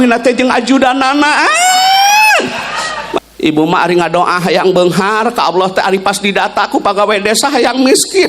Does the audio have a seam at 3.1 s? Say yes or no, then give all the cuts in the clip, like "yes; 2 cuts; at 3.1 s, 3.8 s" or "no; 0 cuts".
yes; 1 cut; at 3.1 s